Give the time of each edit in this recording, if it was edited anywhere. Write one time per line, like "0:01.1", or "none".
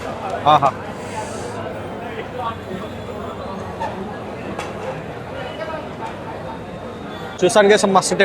0:07.3